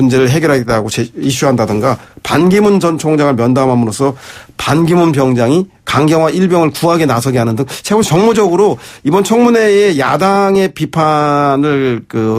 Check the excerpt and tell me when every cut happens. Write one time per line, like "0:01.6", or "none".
0:03.5